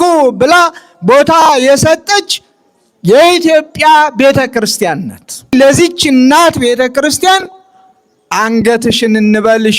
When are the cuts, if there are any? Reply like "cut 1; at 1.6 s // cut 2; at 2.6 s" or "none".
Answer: cut 1; at 5.5 s